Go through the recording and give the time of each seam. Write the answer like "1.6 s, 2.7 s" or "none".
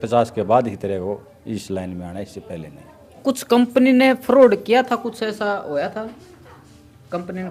3.2 s